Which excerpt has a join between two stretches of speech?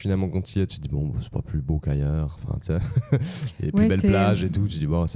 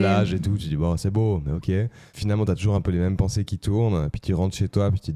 second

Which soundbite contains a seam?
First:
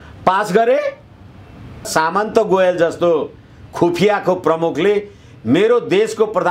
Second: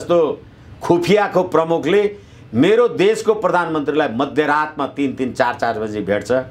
first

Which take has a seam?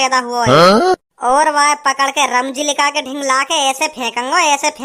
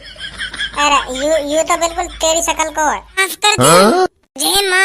second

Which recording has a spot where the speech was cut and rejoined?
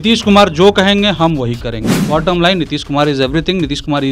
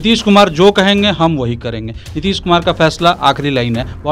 first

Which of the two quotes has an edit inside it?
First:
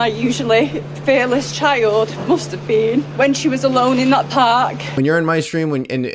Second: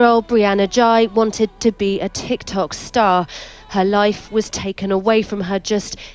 first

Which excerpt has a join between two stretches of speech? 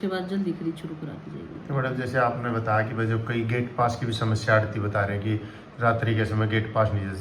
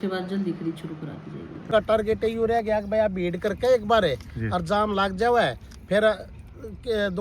second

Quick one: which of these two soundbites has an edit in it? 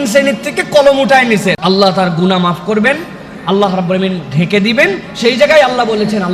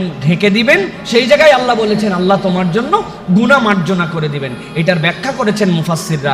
first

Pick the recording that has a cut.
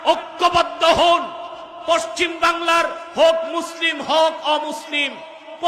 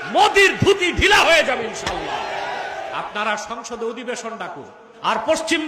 second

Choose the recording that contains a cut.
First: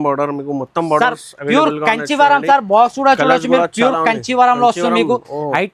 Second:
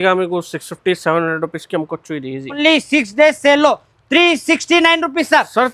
second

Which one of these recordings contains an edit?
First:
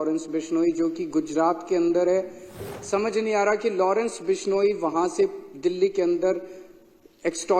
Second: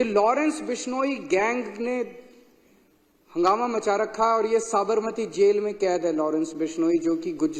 first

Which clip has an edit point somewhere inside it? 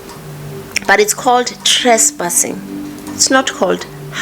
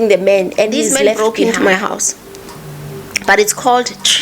second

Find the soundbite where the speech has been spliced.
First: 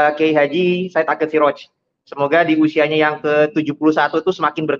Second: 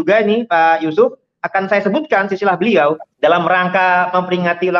second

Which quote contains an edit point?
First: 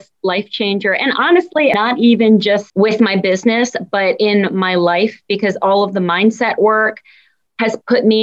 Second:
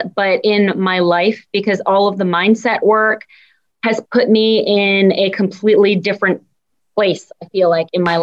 first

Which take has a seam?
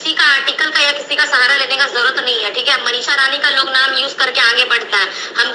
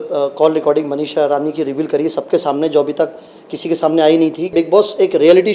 second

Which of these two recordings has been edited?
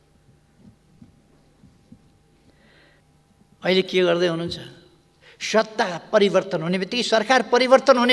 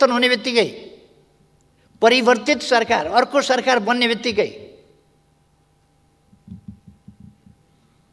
first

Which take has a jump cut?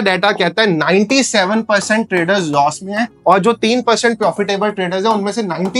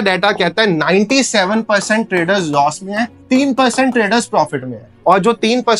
first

